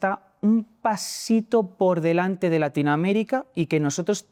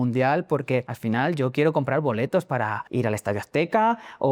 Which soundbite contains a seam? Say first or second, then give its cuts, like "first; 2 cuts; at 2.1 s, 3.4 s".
second; 2 cuts; at 0.9 s, 2.8 s